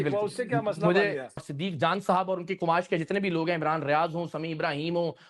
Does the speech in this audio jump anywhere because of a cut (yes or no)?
yes